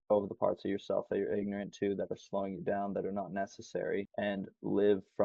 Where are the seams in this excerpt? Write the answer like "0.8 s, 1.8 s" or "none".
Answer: 4.1 s